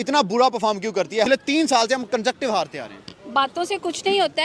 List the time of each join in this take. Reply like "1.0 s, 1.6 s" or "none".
1.3 s